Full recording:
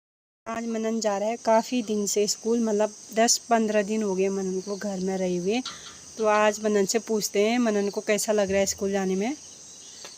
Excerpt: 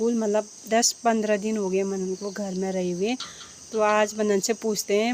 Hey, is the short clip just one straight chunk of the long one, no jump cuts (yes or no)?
yes